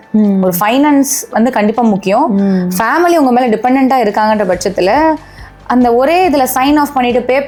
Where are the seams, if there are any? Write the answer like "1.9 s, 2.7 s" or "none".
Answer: none